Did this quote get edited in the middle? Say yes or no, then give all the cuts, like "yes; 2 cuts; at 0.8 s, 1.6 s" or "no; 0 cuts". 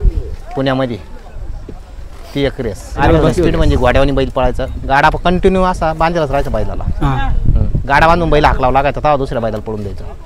yes; 1 cut; at 2.9 s